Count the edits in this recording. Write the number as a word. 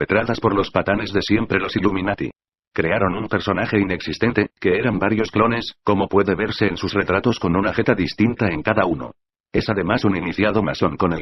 one